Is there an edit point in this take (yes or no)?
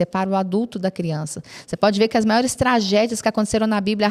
no